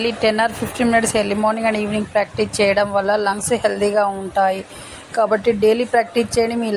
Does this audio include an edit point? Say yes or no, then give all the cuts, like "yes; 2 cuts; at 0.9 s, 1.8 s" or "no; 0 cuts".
no; 0 cuts